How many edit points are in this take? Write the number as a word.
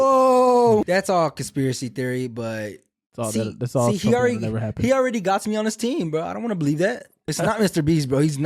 two